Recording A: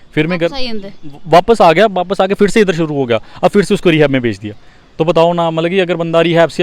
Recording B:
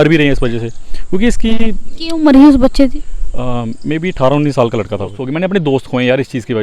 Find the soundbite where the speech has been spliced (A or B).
B